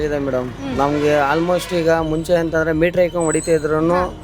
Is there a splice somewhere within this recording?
no; 0 cuts

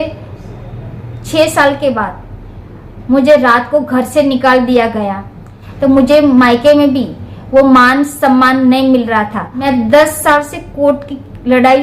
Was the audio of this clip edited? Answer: yes; 2 cuts; at 5.6 s, 9.6 s

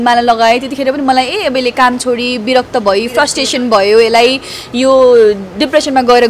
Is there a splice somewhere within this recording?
no; 0 cuts

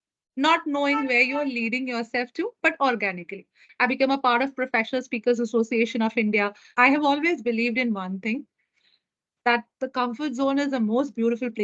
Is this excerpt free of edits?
no; 2 cuts; at 3.6 s, 6.6 s

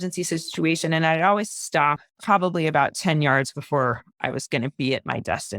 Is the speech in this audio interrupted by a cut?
yes; 1 cut; at 2.1 s

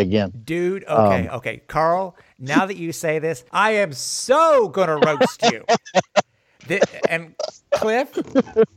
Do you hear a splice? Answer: yes; 2 cuts; at 1.6 s, 3.4 s

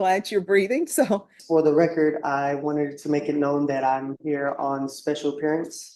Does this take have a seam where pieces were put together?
yes; 1 cut; at 1.3 s

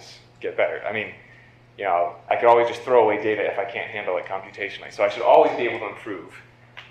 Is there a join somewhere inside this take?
yes; 1 cut; at 3.2 s

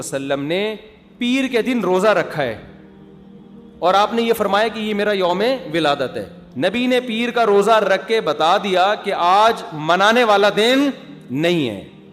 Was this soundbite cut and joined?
yes; 1 cut; at 6.4 s

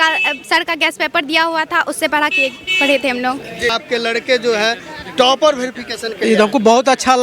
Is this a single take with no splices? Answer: no; 1 cut; at 3.7 s

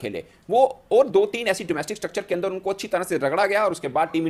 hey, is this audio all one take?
yes; 0 cuts

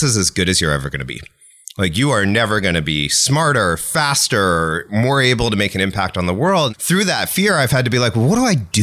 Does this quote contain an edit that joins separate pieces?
yes; 1 cut; at 6.8 s

